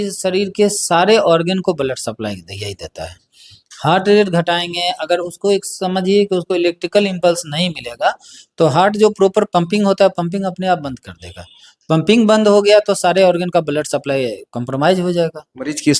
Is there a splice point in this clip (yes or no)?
no